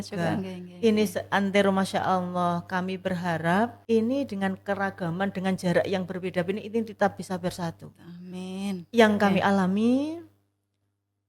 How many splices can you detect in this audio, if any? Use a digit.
1